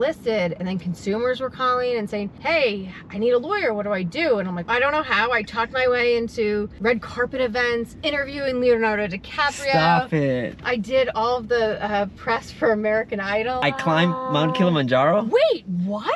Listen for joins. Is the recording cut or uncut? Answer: cut